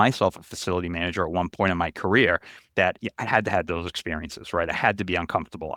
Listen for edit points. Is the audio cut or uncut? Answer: uncut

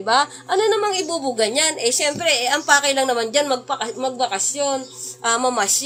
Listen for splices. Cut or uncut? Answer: uncut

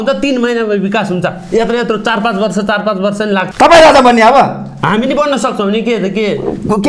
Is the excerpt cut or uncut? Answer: cut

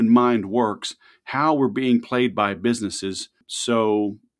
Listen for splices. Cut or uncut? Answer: cut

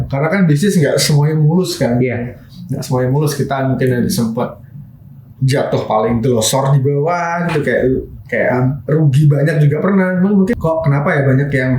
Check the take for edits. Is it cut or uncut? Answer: cut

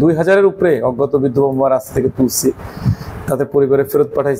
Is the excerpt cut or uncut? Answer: uncut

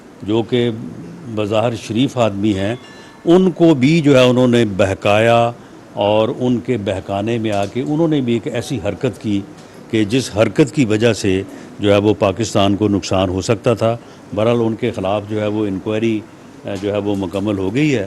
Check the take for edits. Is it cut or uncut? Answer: uncut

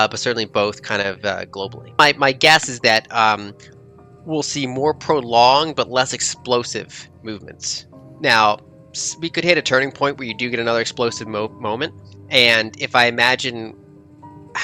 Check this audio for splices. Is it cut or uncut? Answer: cut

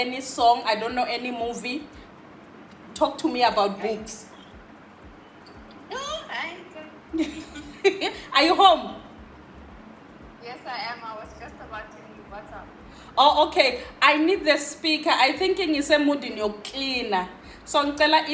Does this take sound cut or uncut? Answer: uncut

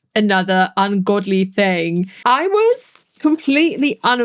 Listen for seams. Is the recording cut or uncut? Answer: cut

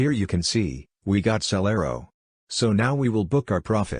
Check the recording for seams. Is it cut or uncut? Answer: cut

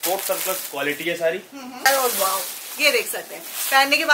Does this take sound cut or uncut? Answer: cut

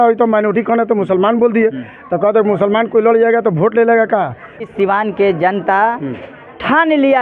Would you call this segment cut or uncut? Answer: cut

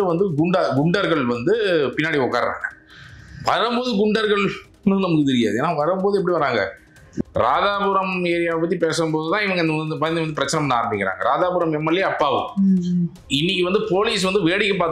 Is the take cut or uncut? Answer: cut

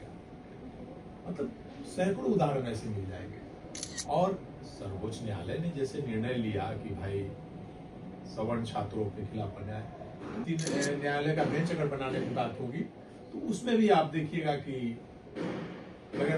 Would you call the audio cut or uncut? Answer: cut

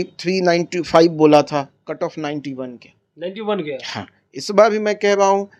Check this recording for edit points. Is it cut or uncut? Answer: uncut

